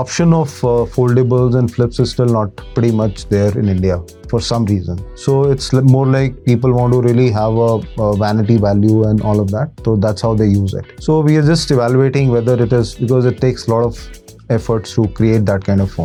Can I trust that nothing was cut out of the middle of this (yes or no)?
yes